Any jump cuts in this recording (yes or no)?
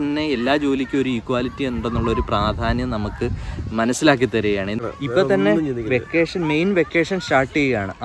yes